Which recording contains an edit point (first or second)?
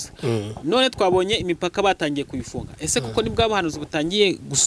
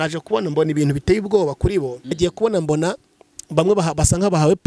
second